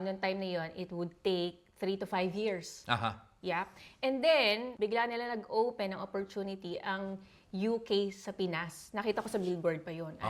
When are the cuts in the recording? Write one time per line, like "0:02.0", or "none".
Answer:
0:04.7